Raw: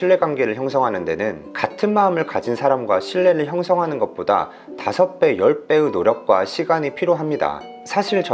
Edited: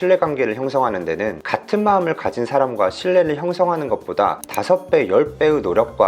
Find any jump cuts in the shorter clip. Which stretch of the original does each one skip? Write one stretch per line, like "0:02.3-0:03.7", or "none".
0:01.4-0:01.5
0:04.6-0:04.8